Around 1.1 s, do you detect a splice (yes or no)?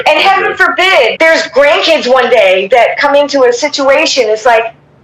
yes